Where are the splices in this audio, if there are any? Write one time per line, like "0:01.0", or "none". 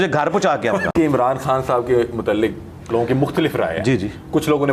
0:00.9